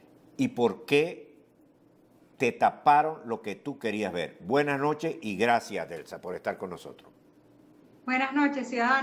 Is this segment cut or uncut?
cut